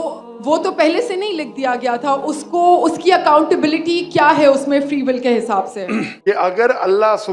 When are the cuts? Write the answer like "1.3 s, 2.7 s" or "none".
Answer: 6.1 s